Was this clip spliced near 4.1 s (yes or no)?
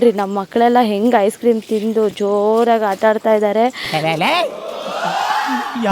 no